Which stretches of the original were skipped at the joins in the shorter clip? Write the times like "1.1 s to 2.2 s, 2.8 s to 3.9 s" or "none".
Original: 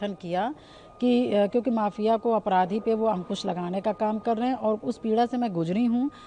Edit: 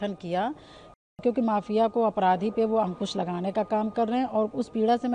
1.1 s to 1.4 s